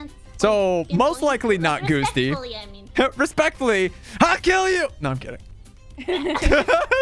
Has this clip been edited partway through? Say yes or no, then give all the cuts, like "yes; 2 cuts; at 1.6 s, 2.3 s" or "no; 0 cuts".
no; 0 cuts